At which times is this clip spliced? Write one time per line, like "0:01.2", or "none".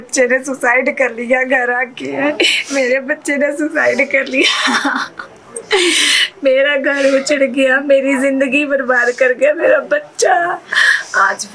none